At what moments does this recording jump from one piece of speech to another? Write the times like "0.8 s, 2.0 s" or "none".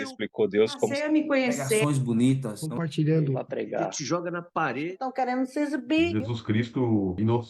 none